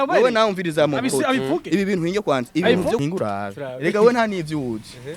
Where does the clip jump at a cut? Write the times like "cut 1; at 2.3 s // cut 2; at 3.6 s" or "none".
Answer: cut 1; at 3.0 s